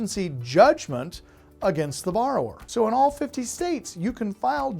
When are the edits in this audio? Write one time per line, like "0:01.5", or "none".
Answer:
0:02.6